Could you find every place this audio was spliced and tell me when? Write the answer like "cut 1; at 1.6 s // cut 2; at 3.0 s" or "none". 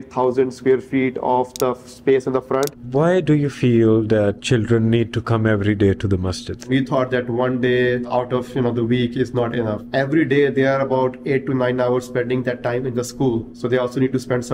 cut 1; at 2.7 s // cut 2; at 4.4 s // cut 3; at 6.6 s // cut 4; at 8.1 s // cut 5; at 9.8 s